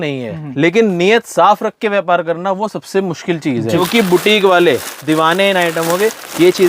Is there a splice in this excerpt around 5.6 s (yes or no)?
no